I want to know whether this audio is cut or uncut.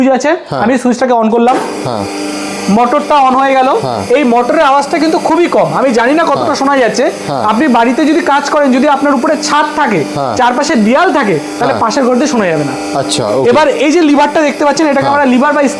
uncut